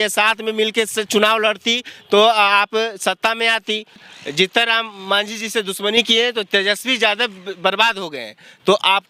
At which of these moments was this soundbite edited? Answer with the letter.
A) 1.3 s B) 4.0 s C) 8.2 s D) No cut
B